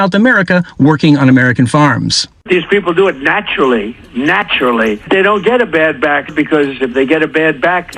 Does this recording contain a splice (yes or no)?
no